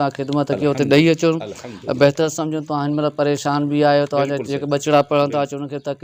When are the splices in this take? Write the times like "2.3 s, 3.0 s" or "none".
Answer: none